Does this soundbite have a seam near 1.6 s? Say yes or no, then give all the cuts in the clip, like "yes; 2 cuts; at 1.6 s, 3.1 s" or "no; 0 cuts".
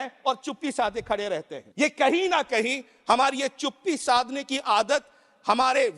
yes; 1 cut; at 1.6 s